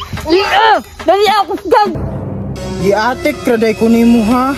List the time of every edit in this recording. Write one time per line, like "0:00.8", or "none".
0:02.0